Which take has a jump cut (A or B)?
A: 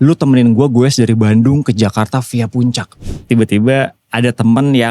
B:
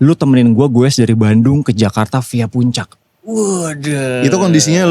A